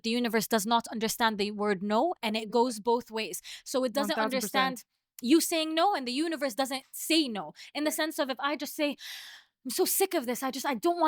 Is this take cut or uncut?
uncut